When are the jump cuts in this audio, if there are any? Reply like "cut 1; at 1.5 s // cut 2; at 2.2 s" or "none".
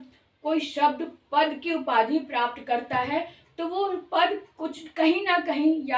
none